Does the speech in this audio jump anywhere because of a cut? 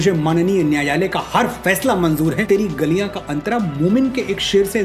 yes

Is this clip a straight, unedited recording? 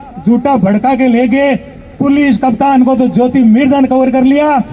yes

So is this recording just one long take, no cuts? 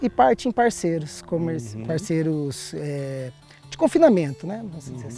yes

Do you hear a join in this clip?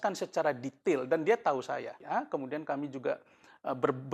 yes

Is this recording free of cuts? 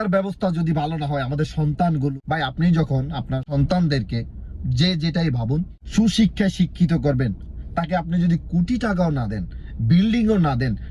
no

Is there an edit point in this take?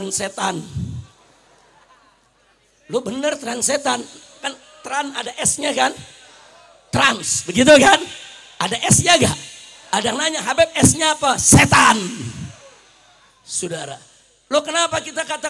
no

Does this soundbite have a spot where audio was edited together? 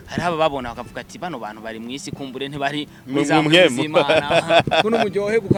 no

